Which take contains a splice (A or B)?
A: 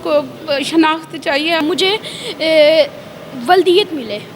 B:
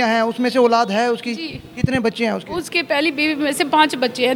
A